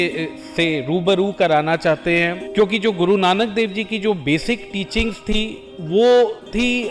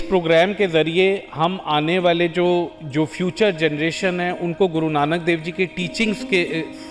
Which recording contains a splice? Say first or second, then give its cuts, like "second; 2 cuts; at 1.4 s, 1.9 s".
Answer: first; 1 cut; at 2.4 s